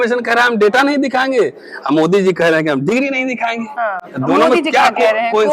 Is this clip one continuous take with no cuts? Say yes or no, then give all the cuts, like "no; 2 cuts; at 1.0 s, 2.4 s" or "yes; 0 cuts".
yes; 0 cuts